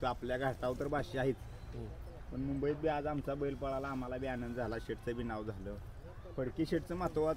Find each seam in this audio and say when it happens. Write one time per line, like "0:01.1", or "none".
none